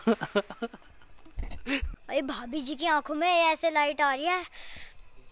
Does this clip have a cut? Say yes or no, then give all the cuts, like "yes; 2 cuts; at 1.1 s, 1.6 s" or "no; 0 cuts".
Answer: yes; 1 cut; at 1.9 s